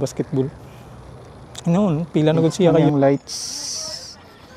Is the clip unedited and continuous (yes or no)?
no